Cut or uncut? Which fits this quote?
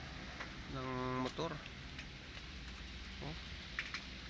uncut